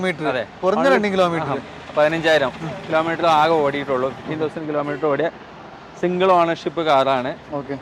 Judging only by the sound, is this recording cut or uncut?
uncut